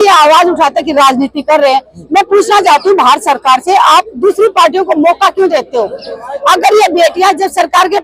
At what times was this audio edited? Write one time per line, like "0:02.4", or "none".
none